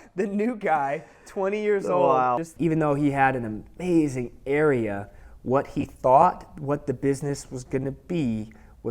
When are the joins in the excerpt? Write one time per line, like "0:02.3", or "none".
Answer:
0:02.5